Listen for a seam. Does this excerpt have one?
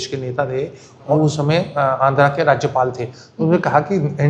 yes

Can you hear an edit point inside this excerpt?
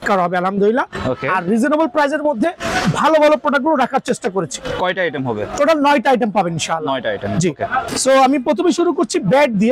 no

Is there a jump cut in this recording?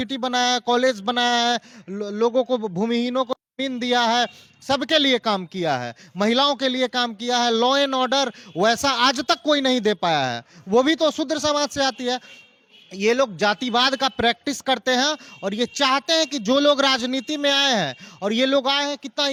no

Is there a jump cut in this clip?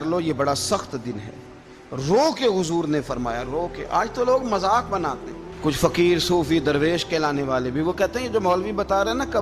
no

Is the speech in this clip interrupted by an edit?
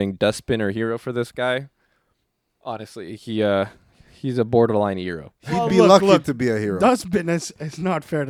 no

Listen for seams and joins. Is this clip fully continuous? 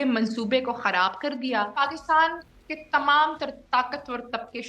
no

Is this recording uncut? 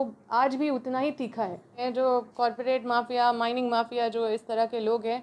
no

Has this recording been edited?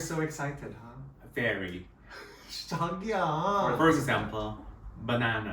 yes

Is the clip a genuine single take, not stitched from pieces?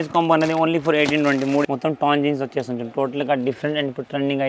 no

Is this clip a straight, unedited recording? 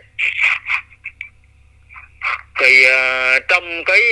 yes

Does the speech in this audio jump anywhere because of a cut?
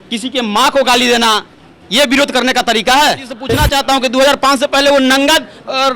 yes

